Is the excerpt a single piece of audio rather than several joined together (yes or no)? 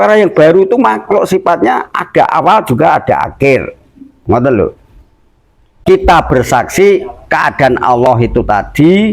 no